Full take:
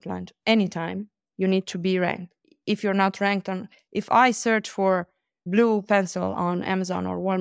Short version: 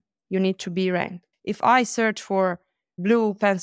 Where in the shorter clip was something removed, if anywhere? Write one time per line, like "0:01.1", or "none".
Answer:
0:01.3